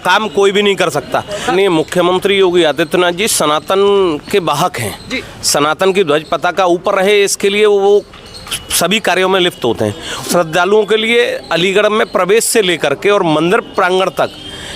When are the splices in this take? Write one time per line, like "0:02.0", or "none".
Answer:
0:01.5
0:10.2